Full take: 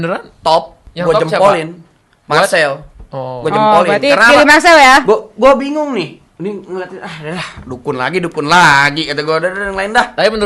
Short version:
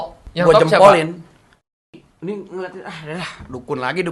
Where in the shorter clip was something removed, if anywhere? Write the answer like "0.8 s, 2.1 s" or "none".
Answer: 1.6 s